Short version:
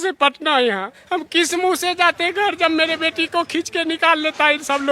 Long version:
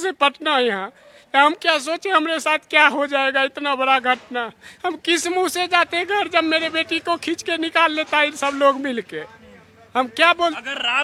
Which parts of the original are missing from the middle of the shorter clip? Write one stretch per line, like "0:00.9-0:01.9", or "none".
0:00.9-0:04.7